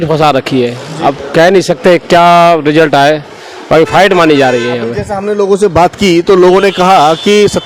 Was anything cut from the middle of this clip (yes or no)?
no